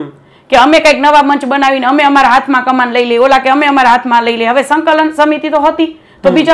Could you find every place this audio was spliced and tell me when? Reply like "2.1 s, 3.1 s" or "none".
none